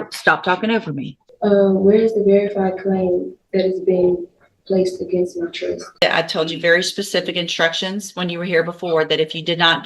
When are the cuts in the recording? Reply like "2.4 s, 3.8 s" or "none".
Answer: 1.2 s, 6.0 s